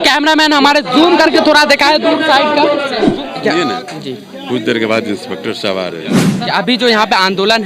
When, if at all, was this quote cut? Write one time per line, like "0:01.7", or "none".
0:02.9
0:06.3